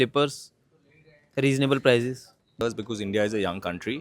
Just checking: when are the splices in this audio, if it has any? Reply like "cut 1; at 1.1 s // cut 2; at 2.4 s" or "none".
cut 1; at 2.6 s